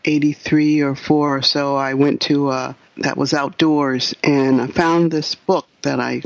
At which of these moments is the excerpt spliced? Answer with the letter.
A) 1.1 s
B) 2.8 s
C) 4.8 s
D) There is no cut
B